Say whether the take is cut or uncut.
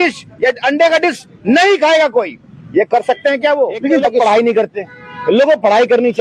cut